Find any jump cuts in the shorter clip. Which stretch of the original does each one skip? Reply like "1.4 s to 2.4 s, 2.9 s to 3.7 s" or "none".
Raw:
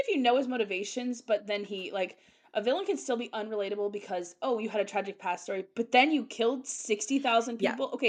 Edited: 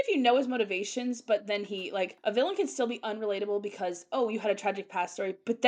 2.1 s to 2.4 s